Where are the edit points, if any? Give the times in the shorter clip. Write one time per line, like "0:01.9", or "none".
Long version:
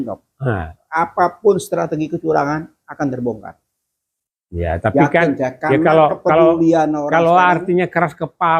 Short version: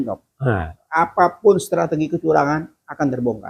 none